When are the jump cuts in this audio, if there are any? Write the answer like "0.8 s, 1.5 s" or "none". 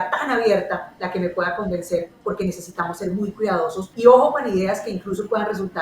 3.8 s